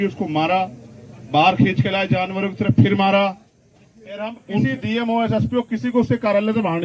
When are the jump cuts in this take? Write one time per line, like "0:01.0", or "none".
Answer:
0:04.4